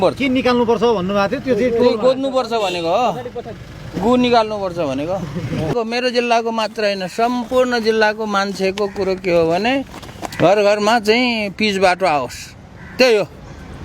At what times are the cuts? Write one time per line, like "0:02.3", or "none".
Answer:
0:05.7

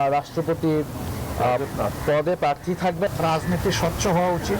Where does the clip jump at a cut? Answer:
0:03.1

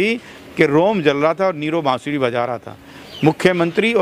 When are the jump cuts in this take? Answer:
none

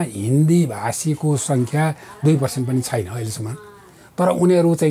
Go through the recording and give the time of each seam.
none

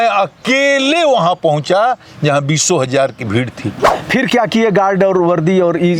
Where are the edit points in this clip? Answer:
0:03.9

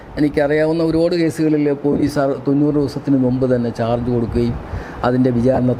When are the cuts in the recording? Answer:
none

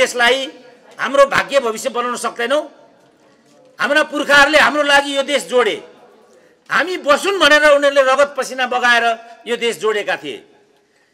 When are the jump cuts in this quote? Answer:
none

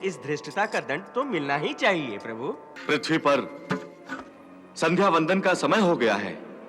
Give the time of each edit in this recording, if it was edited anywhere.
0:02.7

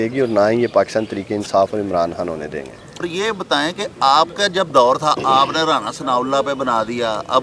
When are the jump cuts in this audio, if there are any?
none

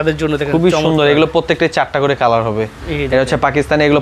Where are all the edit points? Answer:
0:02.8

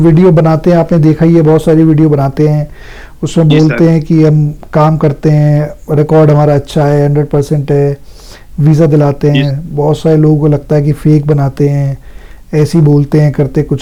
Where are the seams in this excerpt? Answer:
none

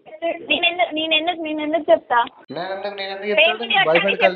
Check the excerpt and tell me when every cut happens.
0:02.4

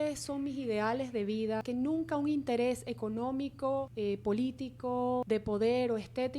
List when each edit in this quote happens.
0:01.6
0:03.9
0:05.2

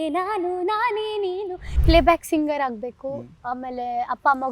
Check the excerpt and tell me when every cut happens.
0:01.7

